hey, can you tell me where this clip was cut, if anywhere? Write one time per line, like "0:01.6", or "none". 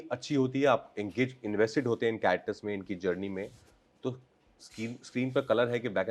none